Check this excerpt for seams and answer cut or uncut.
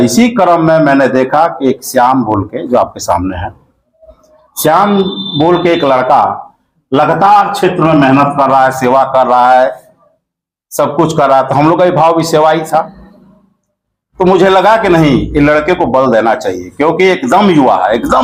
uncut